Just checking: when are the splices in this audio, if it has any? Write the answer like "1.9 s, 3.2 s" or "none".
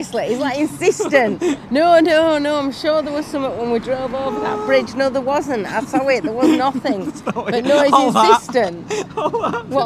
none